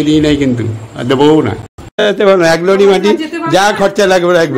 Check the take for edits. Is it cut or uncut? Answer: cut